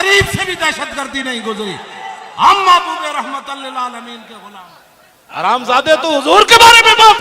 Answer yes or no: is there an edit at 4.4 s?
yes